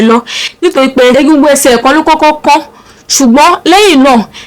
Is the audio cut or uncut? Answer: cut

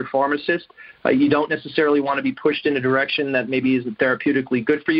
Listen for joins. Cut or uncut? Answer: uncut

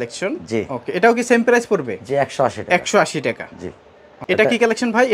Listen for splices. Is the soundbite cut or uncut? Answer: uncut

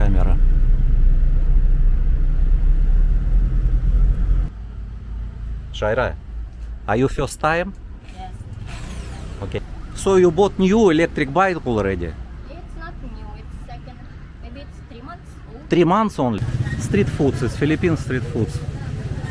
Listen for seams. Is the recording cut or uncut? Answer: cut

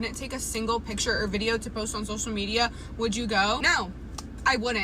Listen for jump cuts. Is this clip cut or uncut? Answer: cut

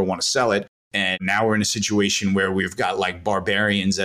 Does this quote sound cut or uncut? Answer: cut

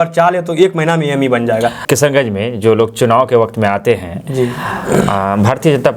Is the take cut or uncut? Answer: uncut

